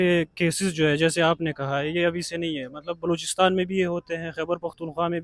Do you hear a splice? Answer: no; 0 cuts

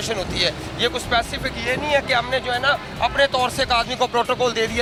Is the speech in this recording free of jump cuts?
yes; 0 cuts

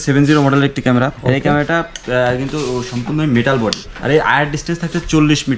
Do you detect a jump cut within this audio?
yes; 2 cuts; at 1.2 s, 3.9 s

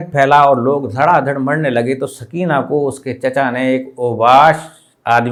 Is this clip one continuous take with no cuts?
yes; 0 cuts

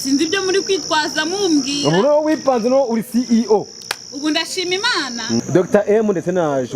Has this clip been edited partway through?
yes; 1 cut; at 5.4 s

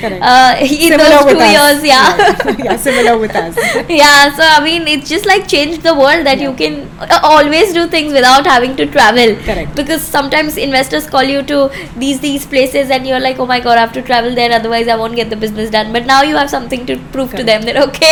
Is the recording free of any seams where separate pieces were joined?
yes; 0 cuts

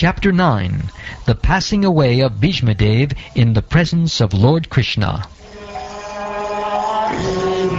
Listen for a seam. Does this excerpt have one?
yes; 1 cut; at 6.4 s

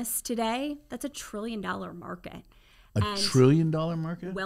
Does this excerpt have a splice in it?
no; 0 cuts

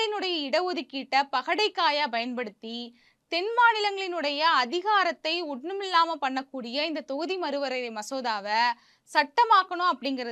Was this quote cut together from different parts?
no; 0 cuts

